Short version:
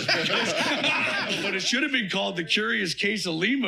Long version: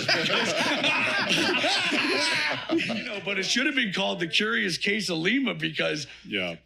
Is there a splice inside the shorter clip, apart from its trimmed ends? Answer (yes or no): yes